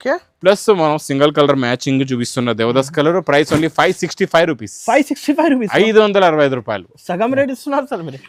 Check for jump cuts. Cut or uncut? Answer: uncut